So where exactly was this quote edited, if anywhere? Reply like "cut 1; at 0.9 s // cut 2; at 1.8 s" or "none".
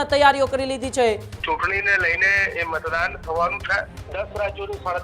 cut 1; at 1.3 s // cut 2; at 4.0 s